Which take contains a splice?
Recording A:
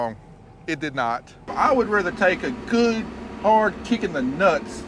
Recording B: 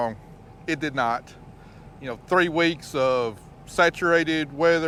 A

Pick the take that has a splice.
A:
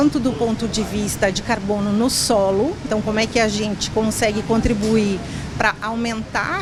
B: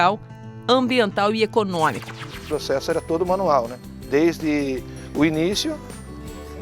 B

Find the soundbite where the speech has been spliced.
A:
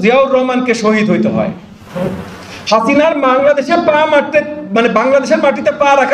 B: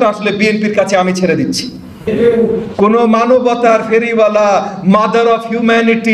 B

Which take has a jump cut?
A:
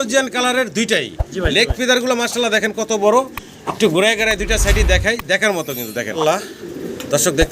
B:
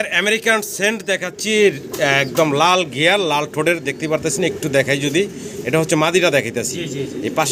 A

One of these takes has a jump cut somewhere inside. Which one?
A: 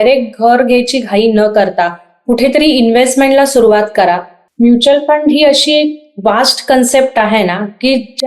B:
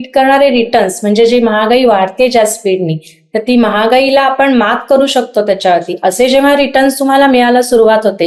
A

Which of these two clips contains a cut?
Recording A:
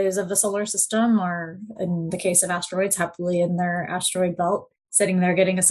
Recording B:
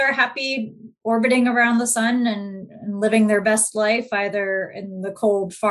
A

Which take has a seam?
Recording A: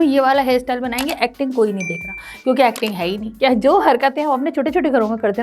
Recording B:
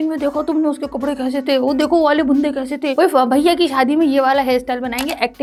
A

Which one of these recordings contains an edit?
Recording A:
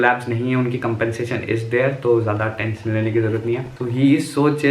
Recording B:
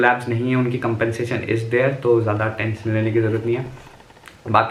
A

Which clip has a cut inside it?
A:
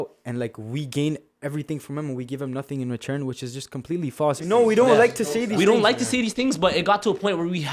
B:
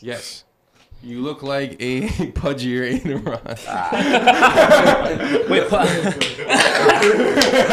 A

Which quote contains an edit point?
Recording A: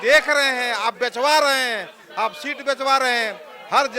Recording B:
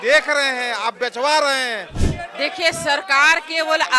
B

